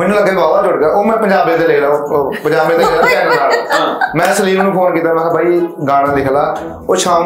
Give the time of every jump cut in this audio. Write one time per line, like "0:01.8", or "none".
none